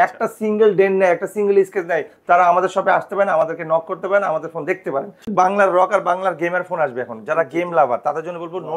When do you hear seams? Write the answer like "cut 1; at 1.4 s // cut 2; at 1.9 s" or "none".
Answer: cut 1; at 5.3 s